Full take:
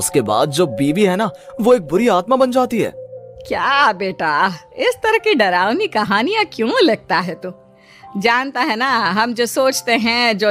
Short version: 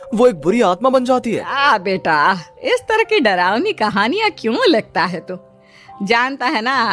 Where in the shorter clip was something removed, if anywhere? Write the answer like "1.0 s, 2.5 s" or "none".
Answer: 1.5 s